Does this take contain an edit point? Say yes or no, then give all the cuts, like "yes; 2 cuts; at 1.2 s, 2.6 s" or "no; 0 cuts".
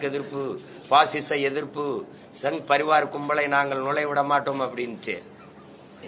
no; 0 cuts